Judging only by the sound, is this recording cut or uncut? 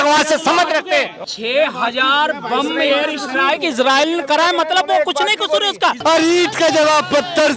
cut